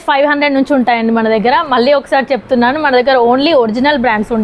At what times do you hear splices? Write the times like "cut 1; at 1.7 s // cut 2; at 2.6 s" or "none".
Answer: none